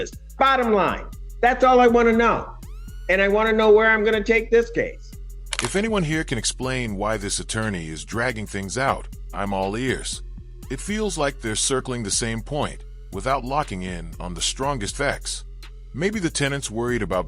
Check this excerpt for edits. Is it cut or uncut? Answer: uncut